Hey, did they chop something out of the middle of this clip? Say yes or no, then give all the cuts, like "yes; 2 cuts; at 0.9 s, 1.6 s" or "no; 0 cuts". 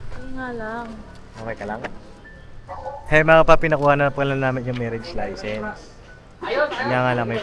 no; 0 cuts